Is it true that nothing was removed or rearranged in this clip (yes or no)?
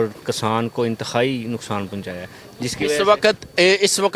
yes